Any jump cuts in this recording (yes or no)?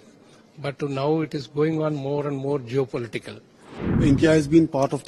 yes